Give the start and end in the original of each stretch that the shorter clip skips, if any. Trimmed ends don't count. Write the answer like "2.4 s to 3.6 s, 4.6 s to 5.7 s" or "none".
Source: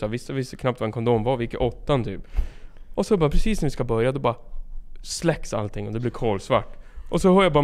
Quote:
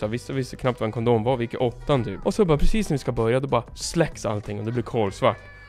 2.1 s to 2.8 s, 4.5 s to 5.1 s